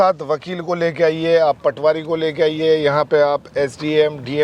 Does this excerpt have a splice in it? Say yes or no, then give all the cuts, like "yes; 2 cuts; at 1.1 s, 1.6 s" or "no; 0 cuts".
no; 0 cuts